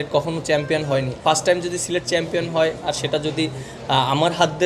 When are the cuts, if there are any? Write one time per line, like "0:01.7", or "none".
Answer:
0:01.2